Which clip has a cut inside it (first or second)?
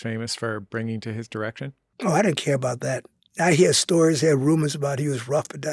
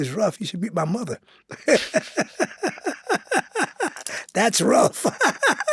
first